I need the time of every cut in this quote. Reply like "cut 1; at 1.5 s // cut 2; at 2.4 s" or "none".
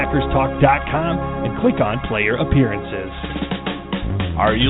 cut 1; at 3.2 s